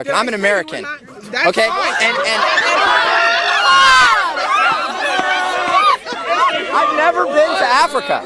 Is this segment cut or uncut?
uncut